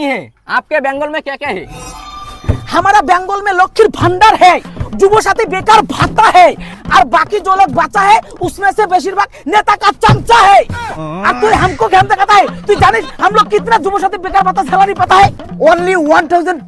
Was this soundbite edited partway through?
no; 0 cuts

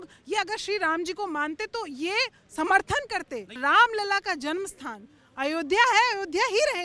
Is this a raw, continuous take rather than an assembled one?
yes; 0 cuts

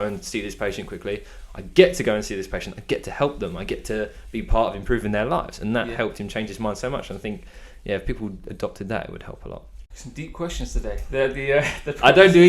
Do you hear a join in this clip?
yes; 1 cut; at 9.8 s

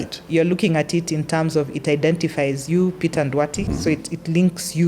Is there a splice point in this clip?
yes; 1 cut; at 3.6 s

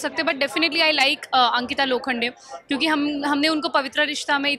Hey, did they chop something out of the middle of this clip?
no; 0 cuts

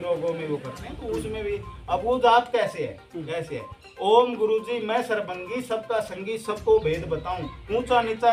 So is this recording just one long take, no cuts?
yes; 0 cuts

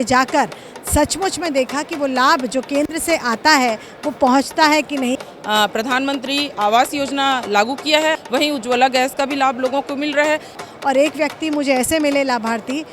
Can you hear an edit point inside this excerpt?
yes; 3 cuts; at 5.2 s, 8.1 s, 10.6 s

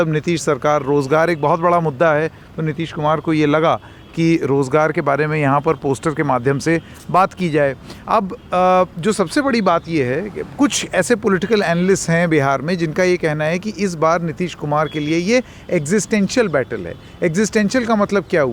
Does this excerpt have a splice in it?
no; 0 cuts

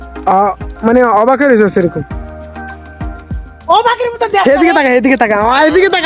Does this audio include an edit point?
no; 0 cuts

